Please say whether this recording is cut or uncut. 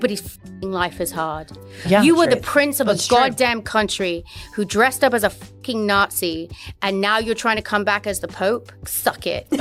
uncut